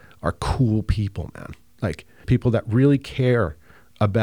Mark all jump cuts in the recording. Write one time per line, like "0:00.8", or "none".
0:02.2